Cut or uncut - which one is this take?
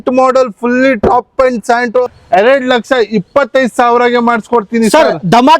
cut